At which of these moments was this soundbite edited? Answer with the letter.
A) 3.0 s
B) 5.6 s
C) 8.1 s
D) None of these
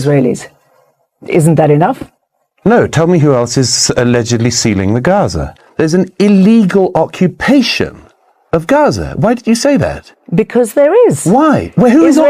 B